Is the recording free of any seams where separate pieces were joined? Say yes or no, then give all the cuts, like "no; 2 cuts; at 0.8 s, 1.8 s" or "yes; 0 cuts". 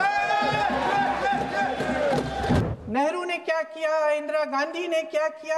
no; 1 cut; at 2.6 s